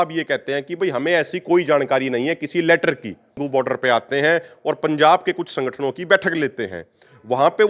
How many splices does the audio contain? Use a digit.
1